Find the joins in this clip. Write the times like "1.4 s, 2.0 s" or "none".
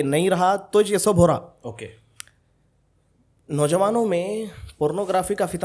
none